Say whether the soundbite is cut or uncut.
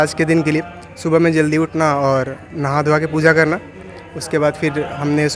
uncut